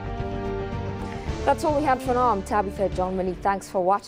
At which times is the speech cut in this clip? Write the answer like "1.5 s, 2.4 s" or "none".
none